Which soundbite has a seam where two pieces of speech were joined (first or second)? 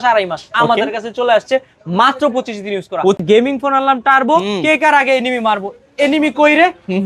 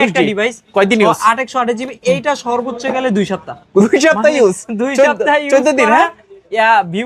first